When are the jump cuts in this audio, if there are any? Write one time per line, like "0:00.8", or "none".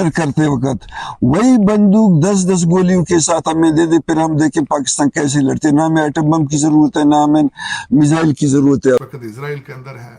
0:09.0